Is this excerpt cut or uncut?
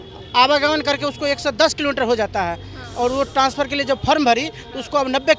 uncut